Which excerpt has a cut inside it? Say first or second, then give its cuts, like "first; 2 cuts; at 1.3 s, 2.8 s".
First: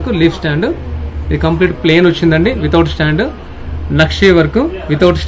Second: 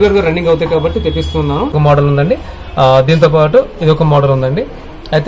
second; 1 cut; at 1.7 s